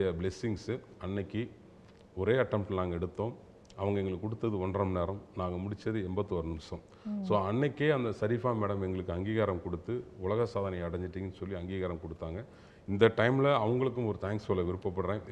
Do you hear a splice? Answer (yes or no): no